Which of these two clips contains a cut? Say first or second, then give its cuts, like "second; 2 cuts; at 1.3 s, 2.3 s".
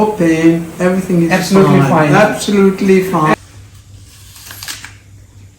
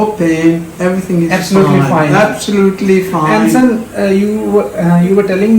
first; 1 cut; at 3.3 s